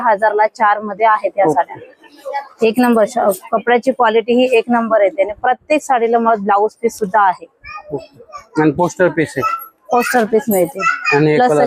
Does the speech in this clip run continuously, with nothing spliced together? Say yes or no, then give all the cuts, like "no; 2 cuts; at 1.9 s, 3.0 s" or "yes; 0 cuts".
yes; 0 cuts